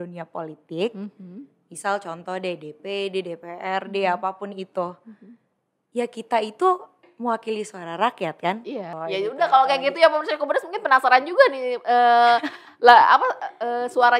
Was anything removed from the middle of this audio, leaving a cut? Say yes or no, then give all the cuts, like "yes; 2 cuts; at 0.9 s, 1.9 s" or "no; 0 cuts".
yes; 1 cut; at 9.0 s